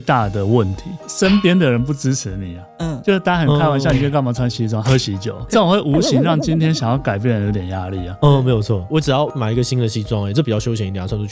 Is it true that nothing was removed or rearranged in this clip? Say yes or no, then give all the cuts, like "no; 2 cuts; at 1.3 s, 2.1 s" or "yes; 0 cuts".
no; 2 cuts; at 1.0 s, 5.5 s